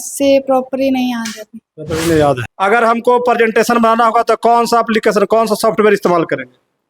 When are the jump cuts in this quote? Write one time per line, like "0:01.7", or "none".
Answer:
0:02.5